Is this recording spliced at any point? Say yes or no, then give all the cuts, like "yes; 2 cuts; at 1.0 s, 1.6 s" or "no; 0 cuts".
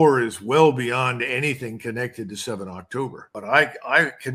yes; 1 cut; at 3.2 s